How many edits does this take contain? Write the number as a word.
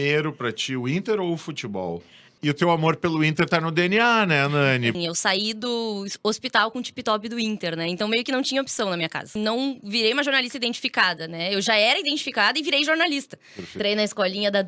four